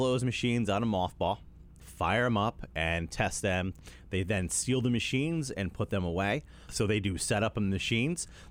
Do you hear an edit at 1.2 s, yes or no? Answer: no